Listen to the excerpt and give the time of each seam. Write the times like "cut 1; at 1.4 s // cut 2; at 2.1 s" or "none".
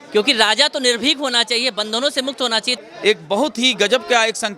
cut 1; at 2.8 s